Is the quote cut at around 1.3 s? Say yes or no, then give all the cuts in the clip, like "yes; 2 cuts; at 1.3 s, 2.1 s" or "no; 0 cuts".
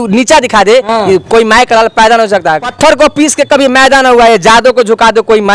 no; 1 cut; at 2.7 s